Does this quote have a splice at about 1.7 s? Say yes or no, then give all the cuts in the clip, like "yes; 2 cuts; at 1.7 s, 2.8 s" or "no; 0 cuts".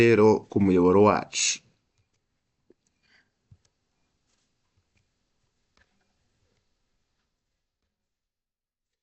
no; 0 cuts